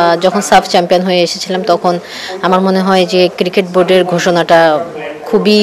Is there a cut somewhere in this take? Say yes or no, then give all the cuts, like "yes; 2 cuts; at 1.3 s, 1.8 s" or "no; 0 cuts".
no; 0 cuts